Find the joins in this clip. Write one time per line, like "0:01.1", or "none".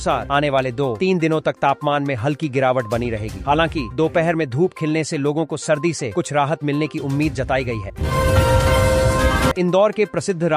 0:07.9
0:09.5